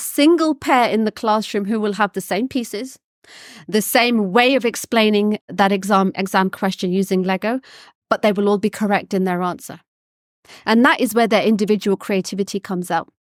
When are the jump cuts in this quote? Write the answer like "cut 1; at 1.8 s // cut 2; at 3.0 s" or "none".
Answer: none